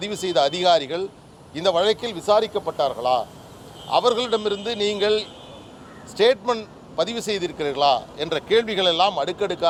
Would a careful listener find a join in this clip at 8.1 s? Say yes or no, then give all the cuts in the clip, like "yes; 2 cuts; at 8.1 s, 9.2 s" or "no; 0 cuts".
no; 0 cuts